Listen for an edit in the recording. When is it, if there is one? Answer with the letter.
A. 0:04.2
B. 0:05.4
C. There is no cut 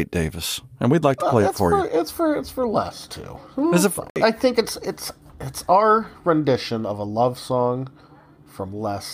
A